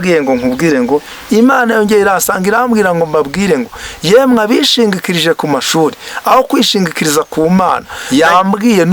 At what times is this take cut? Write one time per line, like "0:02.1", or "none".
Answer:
0:01.1
0:07.9